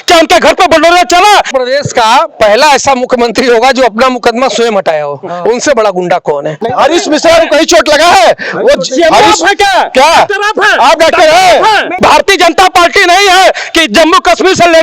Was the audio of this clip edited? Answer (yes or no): yes